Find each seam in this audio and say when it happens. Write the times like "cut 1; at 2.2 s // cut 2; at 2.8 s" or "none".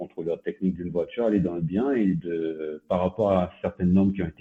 none